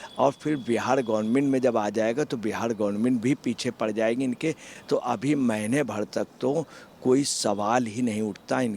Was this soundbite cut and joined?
no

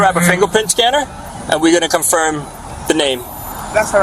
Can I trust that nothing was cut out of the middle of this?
yes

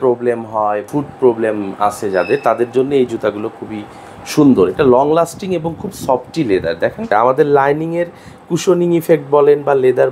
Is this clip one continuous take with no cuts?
no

